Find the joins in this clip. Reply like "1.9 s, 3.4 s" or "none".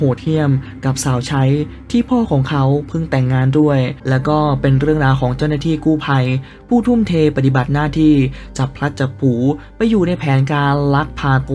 4.0 s